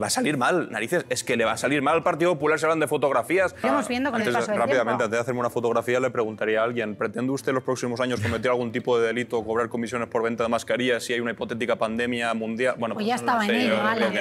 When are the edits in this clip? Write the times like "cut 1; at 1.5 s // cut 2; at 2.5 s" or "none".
cut 1; at 3.6 s